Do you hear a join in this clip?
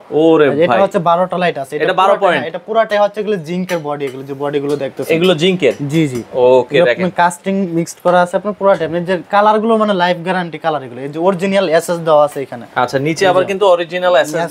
no; 0 cuts

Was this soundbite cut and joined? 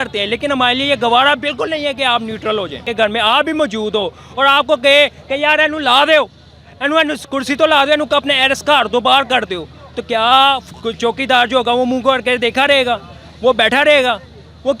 yes; 1 cut; at 2.9 s

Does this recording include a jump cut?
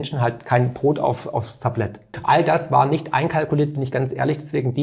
yes; 1 cut; at 2.1 s

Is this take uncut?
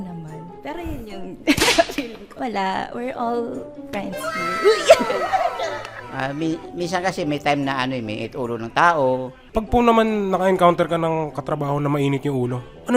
yes; 0 cuts

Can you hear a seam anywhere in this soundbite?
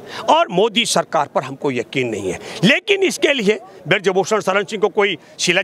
no; 0 cuts

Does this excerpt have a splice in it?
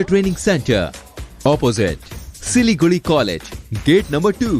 no; 0 cuts

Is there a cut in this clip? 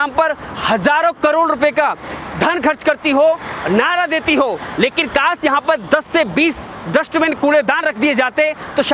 no; 0 cuts

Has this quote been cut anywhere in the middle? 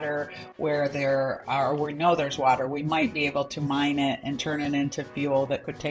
no; 0 cuts

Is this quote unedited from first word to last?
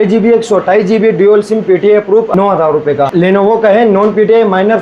no; 2 cuts; at 2.3 s, 3.1 s

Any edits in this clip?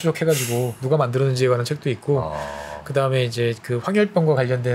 no; 0 cuts

